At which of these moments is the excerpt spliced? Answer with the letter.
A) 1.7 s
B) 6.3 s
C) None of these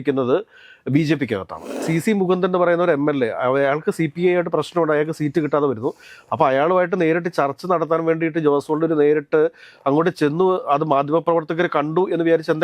A